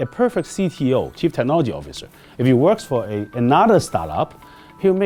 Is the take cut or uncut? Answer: uncut